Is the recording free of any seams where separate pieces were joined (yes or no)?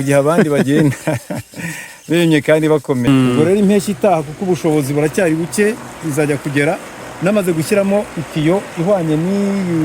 no